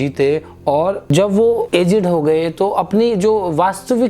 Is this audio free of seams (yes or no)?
no